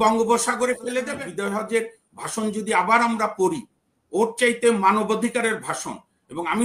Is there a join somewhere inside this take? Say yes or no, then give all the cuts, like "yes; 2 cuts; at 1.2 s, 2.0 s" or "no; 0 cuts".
yes; 1 cut; at 1.1 s